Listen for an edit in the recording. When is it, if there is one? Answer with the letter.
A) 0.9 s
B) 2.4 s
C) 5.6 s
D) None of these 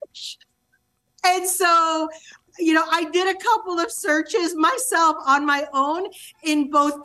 B